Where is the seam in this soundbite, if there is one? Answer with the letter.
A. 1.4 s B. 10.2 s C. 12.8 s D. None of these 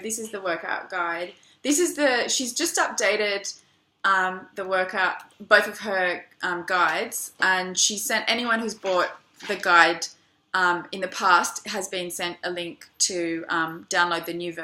C